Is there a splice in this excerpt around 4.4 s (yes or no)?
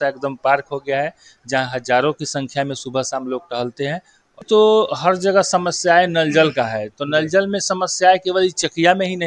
yes